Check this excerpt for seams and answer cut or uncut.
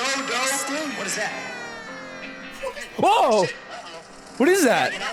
uncut